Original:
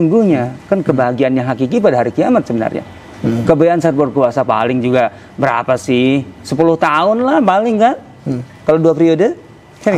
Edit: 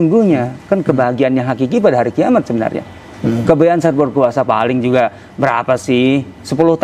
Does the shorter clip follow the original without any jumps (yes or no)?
yes